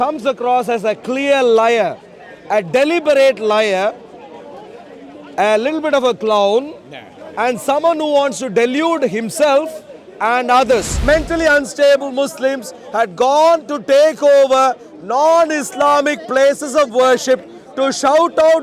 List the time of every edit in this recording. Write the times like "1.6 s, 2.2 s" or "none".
10.9 s